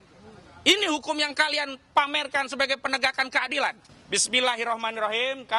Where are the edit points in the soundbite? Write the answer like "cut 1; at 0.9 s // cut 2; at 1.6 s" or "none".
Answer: cut 1; at 3.9 s